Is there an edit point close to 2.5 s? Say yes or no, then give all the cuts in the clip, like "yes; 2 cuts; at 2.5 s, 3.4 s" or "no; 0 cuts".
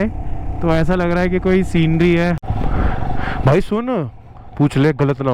yes; 1 cut; at 2.5 s